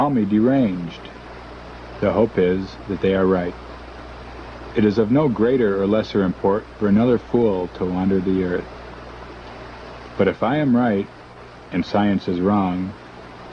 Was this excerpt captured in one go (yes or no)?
no